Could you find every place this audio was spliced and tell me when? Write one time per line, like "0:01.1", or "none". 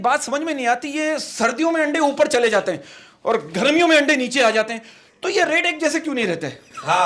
none